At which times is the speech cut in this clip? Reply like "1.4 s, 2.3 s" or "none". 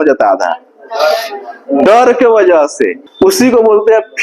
3.0 s

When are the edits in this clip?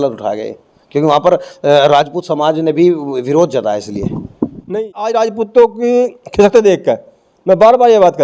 4.7 s

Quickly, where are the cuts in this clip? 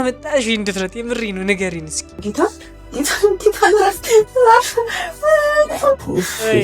2.2 s

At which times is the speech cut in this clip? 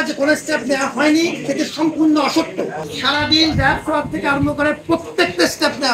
2.8 s

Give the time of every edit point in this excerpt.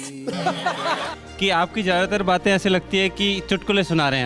1.2 s

